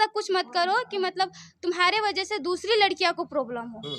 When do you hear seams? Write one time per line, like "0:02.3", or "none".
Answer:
none